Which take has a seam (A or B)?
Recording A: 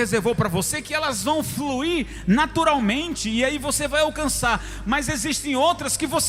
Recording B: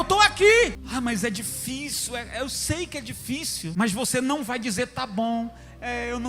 B